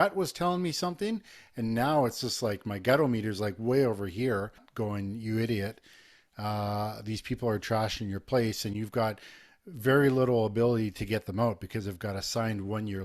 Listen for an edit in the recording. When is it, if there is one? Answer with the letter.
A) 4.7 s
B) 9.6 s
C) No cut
A